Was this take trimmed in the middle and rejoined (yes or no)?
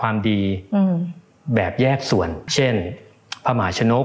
yes